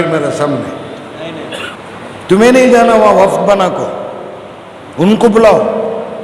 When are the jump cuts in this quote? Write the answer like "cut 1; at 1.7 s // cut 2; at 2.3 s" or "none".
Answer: cut 1; at 1.7 s